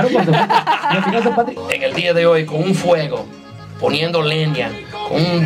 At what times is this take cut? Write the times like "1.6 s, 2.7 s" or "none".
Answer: 1.5 s